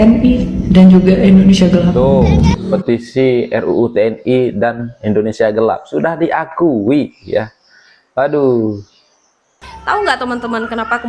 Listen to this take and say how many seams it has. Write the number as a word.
two